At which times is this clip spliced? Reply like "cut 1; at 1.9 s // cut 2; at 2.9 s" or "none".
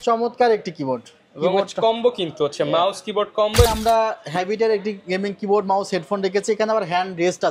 cut 1; at 3.7 s